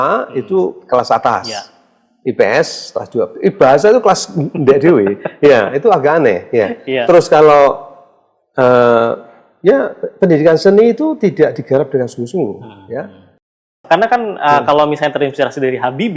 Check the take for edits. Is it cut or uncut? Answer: cut